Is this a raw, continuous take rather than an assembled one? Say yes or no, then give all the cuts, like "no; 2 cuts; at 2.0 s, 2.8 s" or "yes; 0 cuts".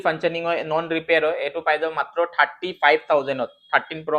yes; 0 cuts